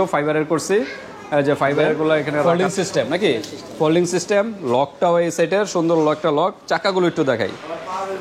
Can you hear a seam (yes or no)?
yes